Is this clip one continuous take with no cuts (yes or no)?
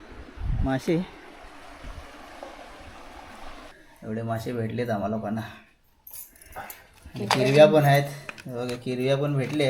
no